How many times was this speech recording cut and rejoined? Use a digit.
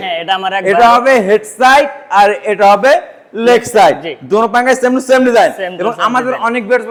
0